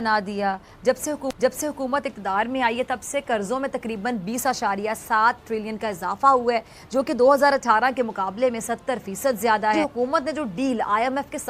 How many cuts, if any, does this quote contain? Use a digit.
1